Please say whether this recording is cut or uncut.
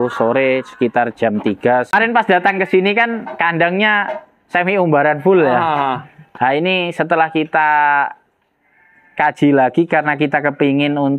cut